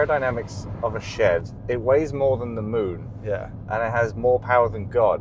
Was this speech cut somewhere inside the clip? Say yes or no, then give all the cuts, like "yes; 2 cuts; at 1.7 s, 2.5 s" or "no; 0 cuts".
no; 0 cuts